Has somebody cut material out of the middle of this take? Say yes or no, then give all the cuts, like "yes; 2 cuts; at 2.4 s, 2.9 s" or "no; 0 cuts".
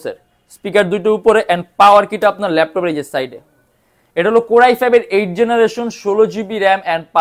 no; 0 cuts